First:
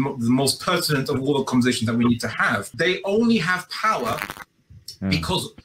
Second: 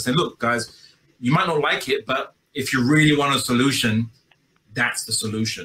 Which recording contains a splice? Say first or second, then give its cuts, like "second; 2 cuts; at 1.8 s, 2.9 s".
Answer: first; 1 cut; at 2.7 s